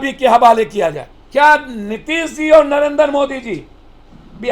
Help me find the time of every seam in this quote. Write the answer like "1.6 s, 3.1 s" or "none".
1.1 s